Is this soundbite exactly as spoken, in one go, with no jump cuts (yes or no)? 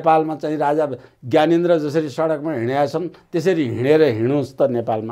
yes